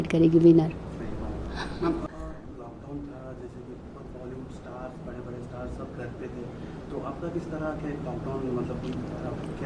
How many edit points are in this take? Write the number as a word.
one